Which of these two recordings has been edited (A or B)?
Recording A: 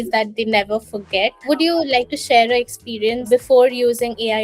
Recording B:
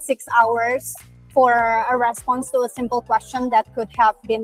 A